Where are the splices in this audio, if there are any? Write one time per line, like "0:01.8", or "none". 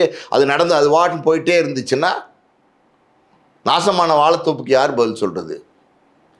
none